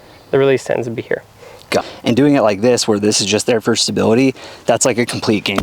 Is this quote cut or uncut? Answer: cut